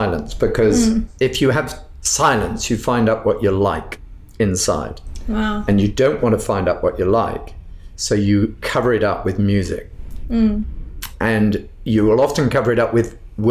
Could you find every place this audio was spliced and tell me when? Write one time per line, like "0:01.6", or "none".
0:01.1
0:08.6